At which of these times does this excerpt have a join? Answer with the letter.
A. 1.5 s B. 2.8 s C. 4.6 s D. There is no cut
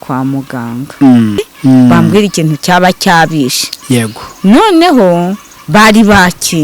A